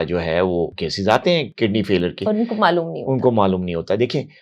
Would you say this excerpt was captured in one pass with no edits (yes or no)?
yes